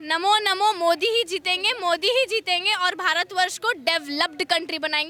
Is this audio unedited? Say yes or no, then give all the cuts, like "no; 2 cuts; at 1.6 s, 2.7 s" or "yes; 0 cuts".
yes; 0 cuts